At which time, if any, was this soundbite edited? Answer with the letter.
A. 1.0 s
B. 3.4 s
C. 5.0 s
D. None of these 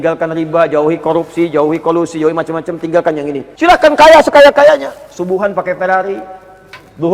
B